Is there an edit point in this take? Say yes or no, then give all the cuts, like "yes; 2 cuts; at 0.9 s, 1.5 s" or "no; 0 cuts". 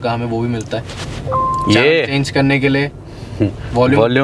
no; 0 cuts